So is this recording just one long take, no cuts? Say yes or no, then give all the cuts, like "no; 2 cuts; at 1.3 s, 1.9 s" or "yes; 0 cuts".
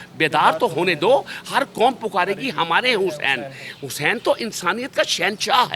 yes; 0 cuts